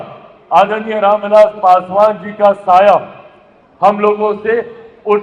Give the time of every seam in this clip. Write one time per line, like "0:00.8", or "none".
none

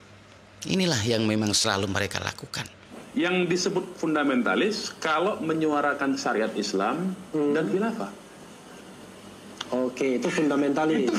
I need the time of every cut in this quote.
0:03.0

